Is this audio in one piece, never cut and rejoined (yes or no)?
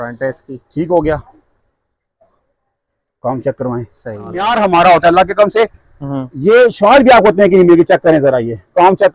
no